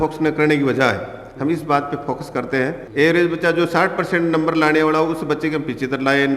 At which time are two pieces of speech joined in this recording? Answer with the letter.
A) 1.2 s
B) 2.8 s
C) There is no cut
B